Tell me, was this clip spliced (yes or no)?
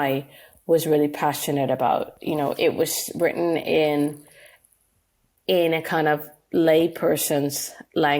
no